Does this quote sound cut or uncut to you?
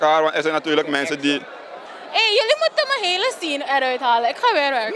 cut